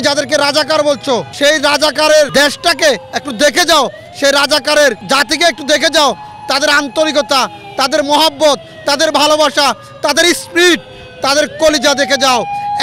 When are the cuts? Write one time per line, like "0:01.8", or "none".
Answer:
0:01.3
0:02.3
0:05.0